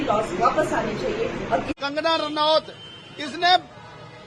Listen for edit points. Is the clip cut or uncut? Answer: cut